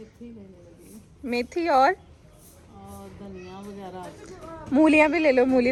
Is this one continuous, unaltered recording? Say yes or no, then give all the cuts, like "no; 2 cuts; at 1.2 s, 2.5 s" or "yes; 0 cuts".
yes; 0 cuts